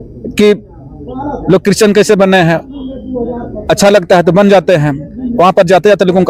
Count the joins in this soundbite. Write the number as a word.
zero